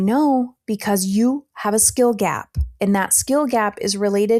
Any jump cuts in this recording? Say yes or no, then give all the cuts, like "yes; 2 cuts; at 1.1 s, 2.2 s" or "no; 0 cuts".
no; 0 cuts